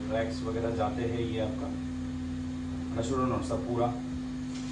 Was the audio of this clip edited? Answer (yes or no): no